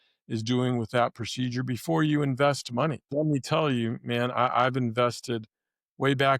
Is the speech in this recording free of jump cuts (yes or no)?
no